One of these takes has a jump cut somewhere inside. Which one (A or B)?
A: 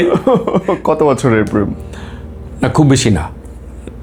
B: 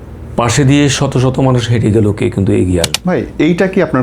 B